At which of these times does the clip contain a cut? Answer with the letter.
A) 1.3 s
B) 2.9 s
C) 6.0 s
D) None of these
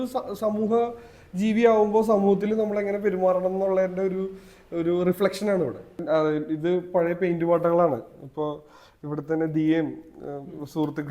C